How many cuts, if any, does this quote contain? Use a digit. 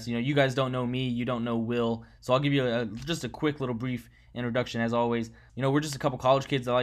1